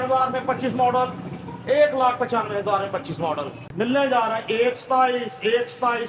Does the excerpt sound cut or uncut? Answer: cut